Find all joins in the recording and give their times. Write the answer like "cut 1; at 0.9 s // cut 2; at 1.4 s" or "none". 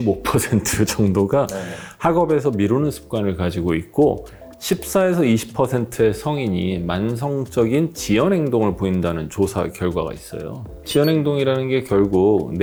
none

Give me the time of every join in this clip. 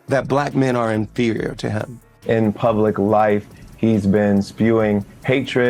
cut 1; at 2.1 s

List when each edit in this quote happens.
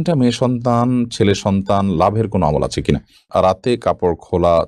cut 1; at 3.2 s

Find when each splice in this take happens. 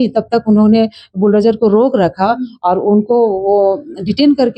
none

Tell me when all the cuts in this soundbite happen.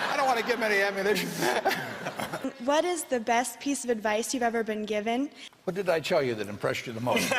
cut 1; at 2.4 s // cut 2; at 5.5 s

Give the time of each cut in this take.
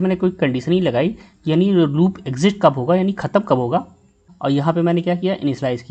cut 1; at 4.3 s

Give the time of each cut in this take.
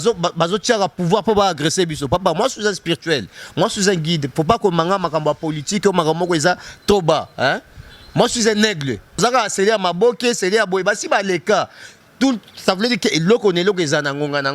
cut 1; at 9.2 s

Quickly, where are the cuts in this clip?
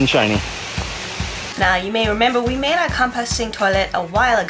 cut 1; at 1.5 s

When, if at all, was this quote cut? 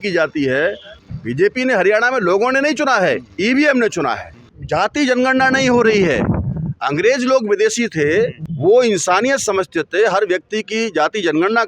cut 1; at 0.9 s // cut 2; at 4.5 s // cut 3; at 8.4 s

